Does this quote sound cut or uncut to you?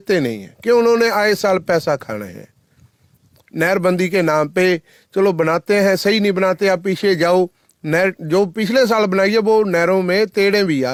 uncut